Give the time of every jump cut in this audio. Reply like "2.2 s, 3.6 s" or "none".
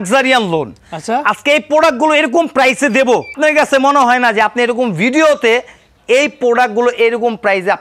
none